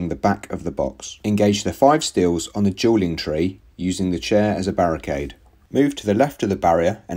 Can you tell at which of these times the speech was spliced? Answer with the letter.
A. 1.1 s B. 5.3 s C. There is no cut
A